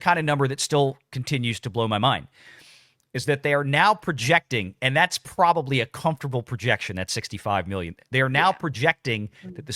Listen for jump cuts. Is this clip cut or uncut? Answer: uncut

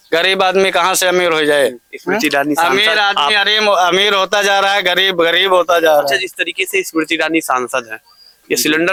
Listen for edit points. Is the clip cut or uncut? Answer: uncut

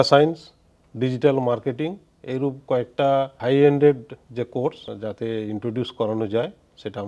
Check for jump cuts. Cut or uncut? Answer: uncut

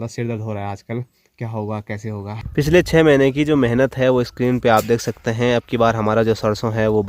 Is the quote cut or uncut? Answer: cut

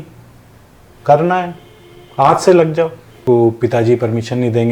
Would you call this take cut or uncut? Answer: cut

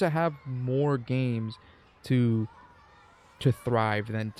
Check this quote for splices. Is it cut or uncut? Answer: uncut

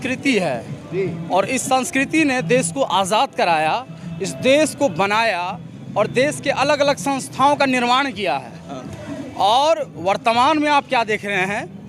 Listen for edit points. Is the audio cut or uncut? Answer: uncut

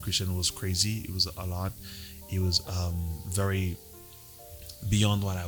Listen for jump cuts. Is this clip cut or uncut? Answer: uncut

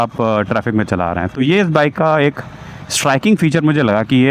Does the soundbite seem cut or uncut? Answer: uncut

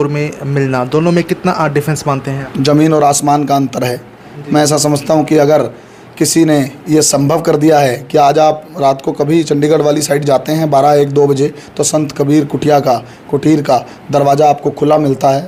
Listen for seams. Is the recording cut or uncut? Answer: uncut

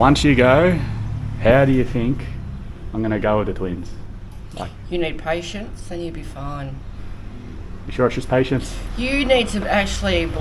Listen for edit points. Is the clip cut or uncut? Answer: uncut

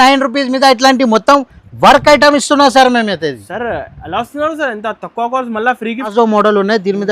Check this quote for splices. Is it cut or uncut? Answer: cut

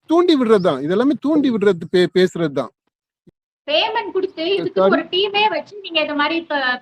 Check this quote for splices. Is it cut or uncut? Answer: uncut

